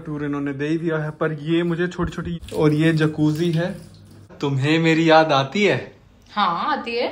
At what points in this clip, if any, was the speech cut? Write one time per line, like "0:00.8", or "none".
0:02.3
0:04.3